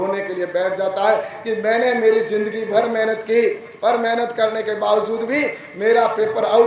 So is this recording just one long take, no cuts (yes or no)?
yes